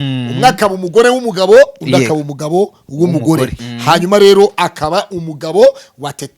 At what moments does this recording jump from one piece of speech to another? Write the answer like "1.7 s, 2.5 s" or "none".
3.7 s